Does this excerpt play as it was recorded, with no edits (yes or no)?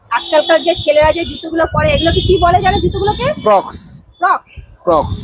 yes